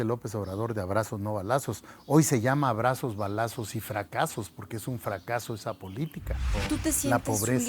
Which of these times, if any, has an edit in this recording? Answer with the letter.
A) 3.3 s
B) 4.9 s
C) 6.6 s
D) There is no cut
C